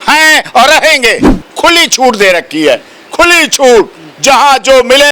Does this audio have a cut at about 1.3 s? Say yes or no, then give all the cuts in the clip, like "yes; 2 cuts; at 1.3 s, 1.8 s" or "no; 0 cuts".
yes; 1 cut; at 1.3 s